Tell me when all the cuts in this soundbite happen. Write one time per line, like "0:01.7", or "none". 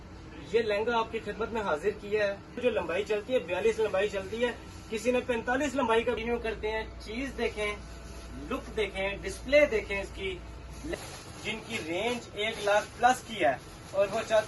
0:02.6
0:06.2
0:10.9

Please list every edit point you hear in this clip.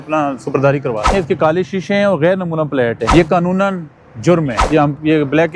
0:01.1
0:03.0
0:04.6

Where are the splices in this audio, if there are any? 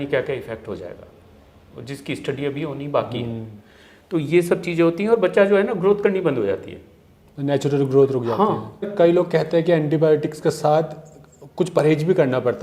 0:08.9

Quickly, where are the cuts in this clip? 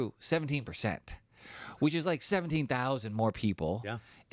none

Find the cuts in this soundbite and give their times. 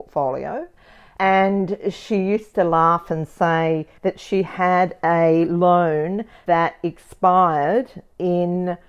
none

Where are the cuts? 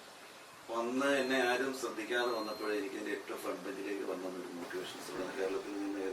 0:05.1

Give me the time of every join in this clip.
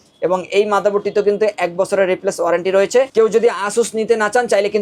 none

